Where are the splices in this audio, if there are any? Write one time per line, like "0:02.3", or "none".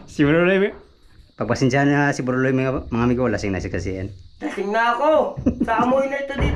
none